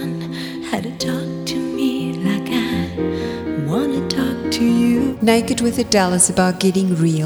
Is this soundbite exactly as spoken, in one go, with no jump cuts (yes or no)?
no